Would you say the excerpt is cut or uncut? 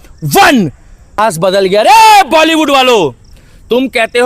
cut